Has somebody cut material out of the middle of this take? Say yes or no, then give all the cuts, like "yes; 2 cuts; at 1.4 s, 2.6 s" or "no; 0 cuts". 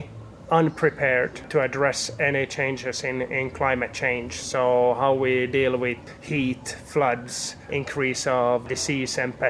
yes; 4 cuts; at 1.5 s, 6.0 s, 7.7 s, 8.6 s